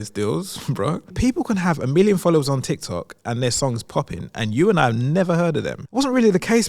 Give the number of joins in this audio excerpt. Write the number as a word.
two